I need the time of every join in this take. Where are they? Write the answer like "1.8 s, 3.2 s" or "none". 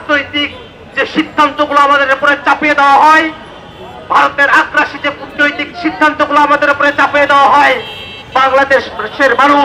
none